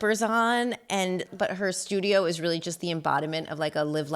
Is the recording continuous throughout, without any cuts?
no; 1 cut; at 1.3 s

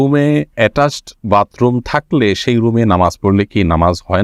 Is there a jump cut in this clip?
no; 0 cuts

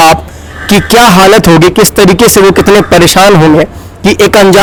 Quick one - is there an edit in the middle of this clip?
no; 0 cuts

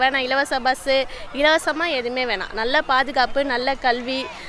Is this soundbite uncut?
yes; 0 cuts

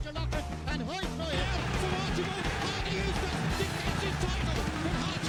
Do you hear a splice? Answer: no; 0 cuts

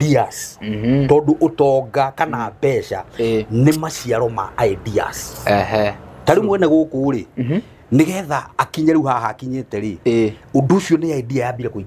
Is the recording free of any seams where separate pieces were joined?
yes; 0 cuts

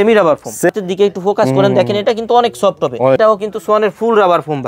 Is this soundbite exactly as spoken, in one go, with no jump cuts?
no; 2 cuts; at 0.7 s, 3.2 s

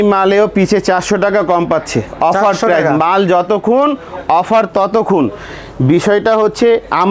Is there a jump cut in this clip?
no; 0 cuts

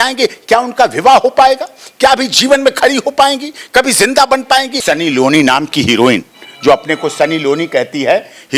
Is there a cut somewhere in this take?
yes; 1 cut; at 4.7 s

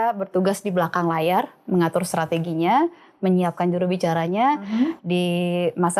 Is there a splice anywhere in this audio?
no; 0 cuts

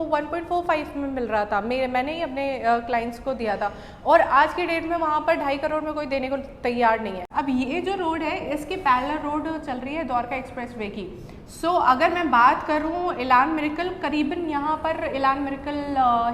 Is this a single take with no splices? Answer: no; 1 cut; at 7.2 s

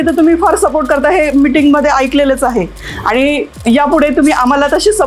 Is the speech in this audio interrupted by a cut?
no; 0 cuts

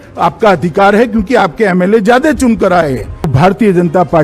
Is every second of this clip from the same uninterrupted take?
no; 1 cut; at 3.3 s

